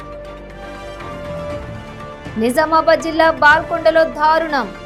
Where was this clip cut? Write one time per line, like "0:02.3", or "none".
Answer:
none